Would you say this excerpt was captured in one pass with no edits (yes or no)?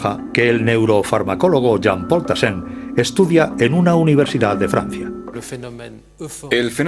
yes